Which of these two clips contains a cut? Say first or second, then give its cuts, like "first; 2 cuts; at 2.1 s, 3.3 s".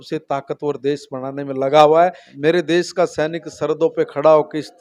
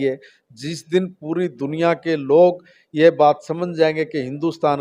first; 1 cut; at 2.3 s